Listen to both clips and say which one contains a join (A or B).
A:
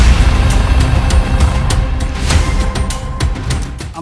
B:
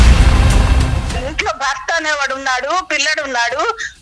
B